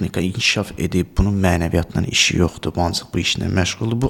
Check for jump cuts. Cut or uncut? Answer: uncut